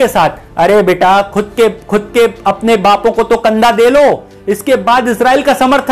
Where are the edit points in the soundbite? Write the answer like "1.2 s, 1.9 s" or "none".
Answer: none